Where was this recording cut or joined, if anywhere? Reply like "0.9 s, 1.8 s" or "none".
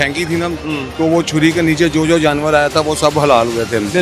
none

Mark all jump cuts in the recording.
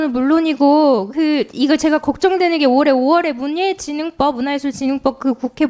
none

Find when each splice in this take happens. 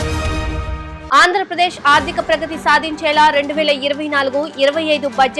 0.9 s

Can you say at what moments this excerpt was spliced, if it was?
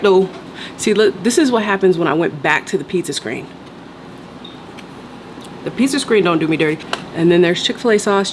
6.9 s

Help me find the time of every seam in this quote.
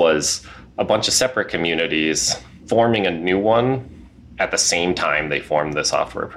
2.6 s

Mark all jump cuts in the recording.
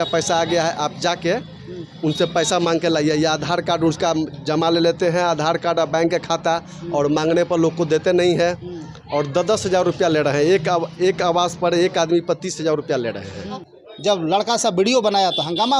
13.7 s

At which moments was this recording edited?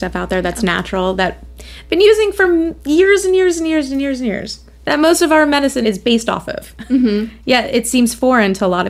5.8 s

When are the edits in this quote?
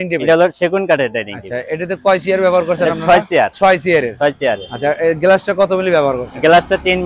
none

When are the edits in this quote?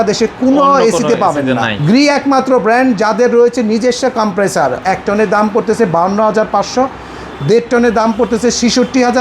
1.7 s, 4.8 s

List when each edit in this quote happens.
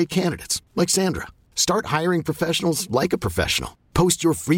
none

